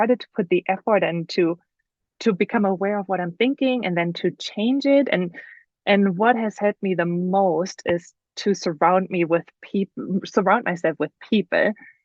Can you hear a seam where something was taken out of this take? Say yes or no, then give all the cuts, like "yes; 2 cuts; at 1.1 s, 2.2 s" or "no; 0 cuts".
no; 0 cuts